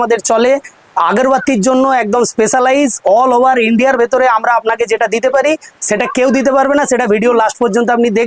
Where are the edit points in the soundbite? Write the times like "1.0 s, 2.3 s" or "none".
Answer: none